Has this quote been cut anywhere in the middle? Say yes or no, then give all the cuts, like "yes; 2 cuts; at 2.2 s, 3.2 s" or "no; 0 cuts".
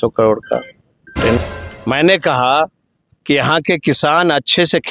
yes; 1 cut; at 1.4 s